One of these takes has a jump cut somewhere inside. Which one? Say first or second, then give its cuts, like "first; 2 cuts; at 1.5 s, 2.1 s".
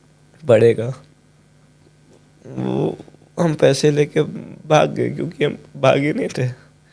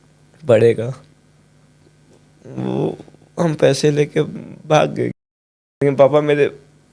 second; 1 cut; at 5.8 s